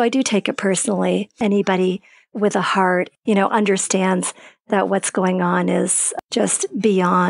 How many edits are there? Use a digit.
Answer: 3